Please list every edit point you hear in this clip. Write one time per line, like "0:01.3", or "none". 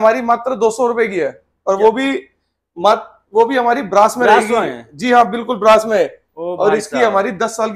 none